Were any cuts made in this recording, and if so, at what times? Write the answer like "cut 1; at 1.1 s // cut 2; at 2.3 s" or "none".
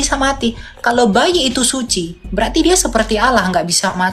none